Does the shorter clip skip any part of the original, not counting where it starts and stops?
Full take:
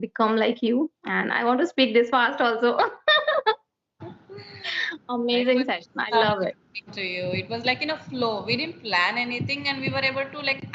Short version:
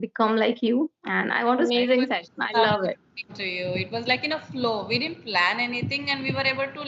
yes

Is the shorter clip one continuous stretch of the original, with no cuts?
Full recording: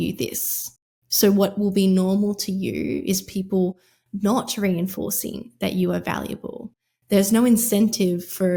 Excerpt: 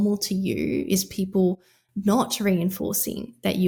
yes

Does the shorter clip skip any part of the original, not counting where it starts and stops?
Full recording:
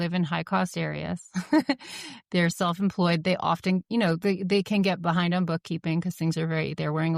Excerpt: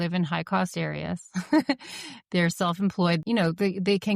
yes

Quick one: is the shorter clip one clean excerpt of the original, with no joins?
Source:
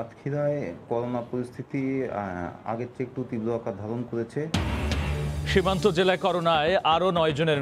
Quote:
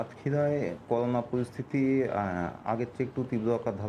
yes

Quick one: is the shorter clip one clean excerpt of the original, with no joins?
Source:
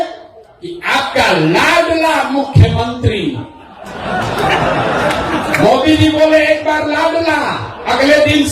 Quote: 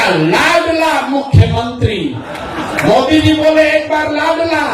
no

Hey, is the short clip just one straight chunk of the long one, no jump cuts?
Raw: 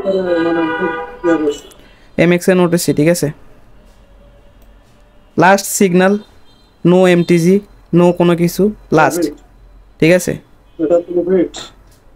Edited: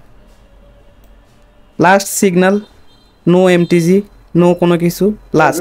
yes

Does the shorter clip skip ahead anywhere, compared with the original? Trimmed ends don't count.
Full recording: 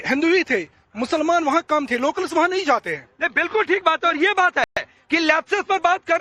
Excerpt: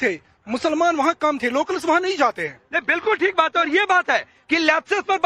yes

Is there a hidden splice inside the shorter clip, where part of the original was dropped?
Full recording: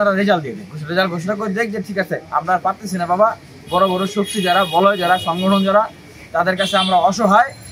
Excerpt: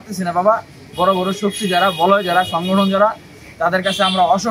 no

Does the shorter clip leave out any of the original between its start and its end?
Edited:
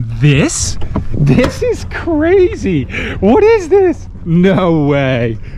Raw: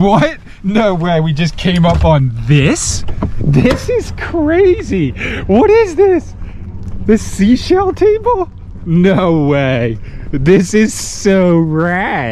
yes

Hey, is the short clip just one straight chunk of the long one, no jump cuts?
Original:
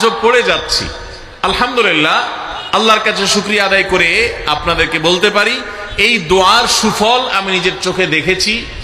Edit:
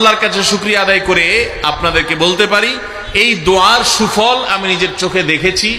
yes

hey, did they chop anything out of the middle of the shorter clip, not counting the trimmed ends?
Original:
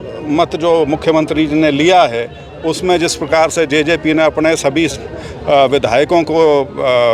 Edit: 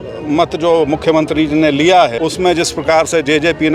yes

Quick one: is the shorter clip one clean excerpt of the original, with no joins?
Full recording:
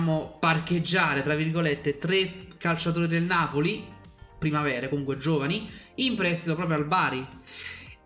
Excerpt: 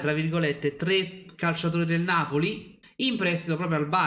no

